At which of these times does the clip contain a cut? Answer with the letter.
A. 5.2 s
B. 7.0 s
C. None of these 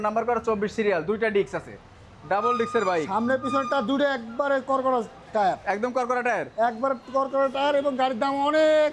C